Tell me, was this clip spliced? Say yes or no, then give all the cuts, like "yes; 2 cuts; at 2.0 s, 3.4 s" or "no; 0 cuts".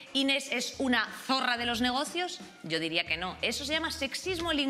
no; 0 cuts